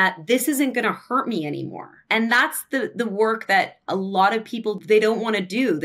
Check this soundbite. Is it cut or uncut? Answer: cut